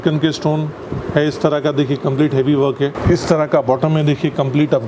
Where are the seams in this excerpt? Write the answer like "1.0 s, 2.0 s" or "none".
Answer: 3.0 s